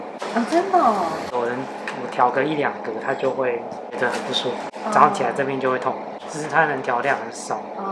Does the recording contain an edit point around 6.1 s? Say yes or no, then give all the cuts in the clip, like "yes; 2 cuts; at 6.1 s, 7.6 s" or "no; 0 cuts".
yes; 1 cut; at 6.1 s